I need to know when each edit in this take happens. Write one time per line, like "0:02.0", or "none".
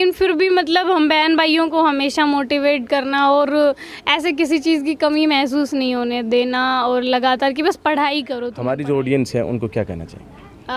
0:08.4